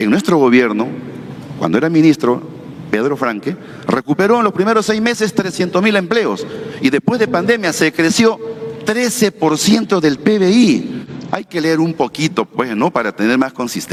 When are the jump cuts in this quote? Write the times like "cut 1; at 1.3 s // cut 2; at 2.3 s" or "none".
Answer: none